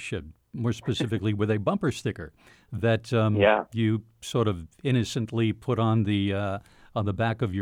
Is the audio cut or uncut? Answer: uncut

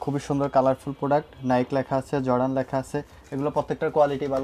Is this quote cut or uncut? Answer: uncut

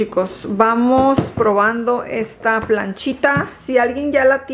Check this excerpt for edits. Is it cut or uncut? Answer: uncut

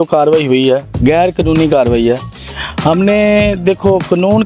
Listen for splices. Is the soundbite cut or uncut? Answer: uncut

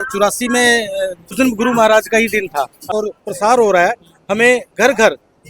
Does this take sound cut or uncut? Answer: cut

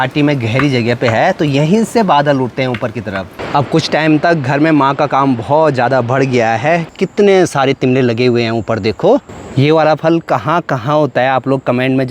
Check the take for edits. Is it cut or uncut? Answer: cut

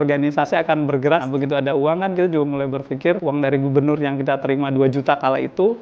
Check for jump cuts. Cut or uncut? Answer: cut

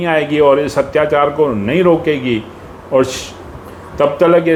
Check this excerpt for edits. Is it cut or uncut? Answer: uncut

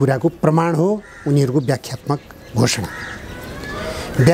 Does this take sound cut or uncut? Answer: uncut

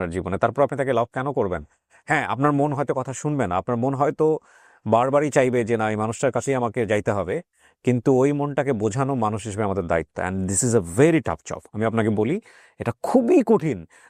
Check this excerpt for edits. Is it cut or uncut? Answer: uncut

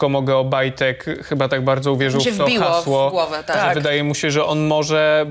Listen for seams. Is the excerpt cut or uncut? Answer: uncut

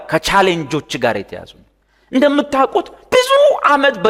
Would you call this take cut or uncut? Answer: uncut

